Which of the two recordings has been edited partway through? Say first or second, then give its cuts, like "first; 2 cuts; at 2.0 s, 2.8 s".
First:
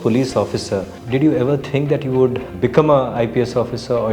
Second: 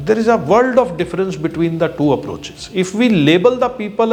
first; 2 cuts; at 1.0 s, 2.5 s